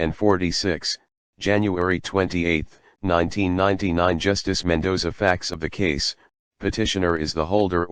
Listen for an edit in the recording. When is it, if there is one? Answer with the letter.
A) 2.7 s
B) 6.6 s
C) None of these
C